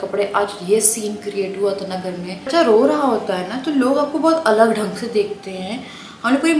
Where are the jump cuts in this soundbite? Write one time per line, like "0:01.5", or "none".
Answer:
0:02.5